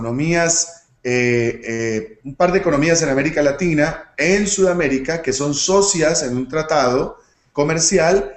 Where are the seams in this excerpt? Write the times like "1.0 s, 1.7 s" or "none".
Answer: 4.3 s

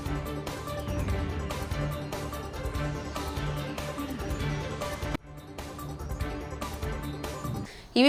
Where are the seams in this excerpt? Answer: none

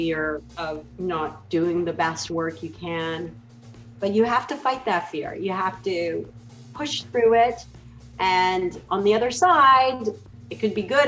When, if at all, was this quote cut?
none

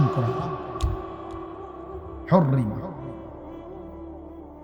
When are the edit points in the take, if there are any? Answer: 3.1 s

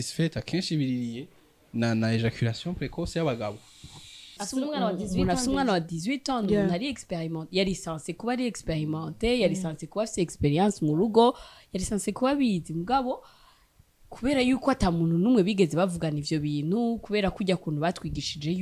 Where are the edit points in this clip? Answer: 4.4 s

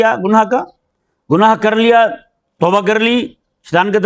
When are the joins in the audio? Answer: none

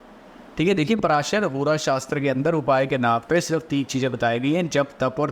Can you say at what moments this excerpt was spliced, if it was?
none

